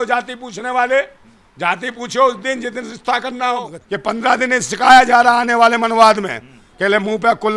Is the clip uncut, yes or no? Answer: no